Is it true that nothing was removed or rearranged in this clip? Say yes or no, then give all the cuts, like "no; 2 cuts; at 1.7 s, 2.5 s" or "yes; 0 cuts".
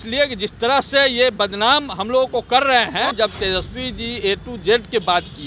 no; 1 cut; at 3.1 s